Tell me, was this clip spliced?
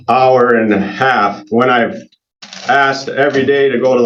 no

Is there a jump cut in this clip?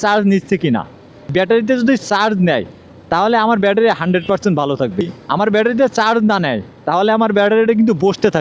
no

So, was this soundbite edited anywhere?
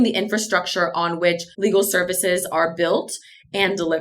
yes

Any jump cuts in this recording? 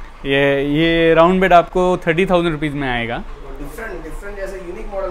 no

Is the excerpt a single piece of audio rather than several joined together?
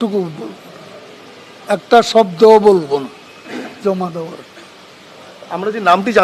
yes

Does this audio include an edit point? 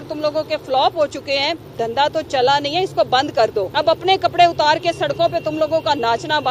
yes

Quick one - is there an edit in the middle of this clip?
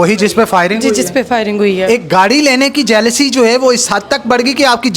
yes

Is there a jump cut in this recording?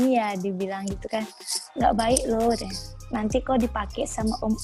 no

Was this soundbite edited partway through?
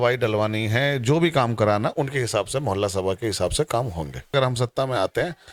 yes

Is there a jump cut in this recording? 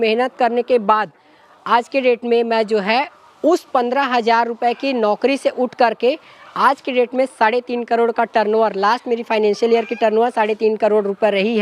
no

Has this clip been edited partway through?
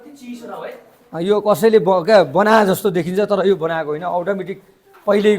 no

